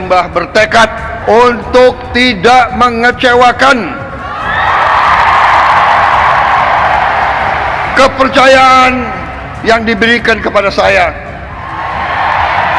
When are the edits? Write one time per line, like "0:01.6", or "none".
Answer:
0:01.1